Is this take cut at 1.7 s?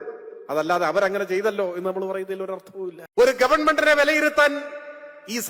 no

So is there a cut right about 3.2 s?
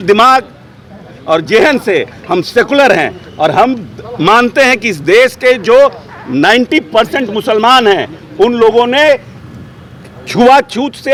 no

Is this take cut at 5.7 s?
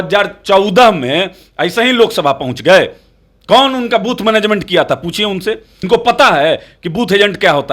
yes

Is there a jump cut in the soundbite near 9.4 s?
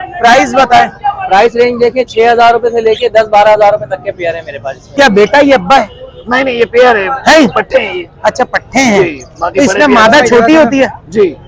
no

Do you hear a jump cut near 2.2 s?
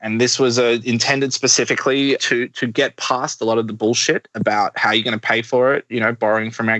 yes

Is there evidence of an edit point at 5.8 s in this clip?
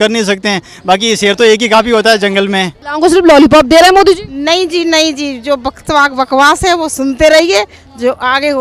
no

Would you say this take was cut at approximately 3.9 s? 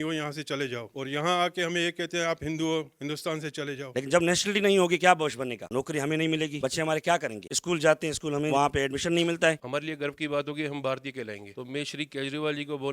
yes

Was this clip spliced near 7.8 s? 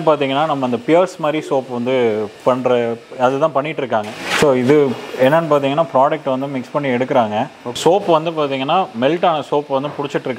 yes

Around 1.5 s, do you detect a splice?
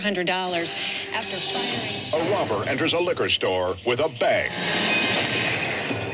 yes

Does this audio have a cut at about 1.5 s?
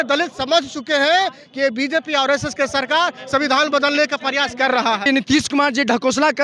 no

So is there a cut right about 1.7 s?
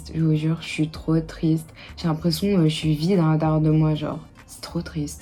no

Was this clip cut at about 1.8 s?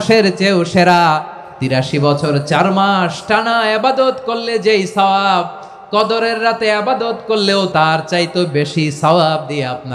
yes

